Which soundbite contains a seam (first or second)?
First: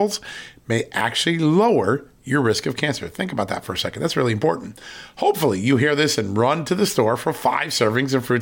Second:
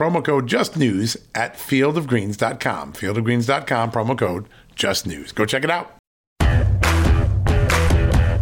second